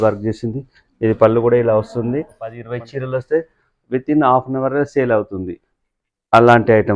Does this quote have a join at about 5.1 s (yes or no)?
no